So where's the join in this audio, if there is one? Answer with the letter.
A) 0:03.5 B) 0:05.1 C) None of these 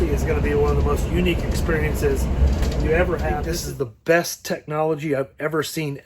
A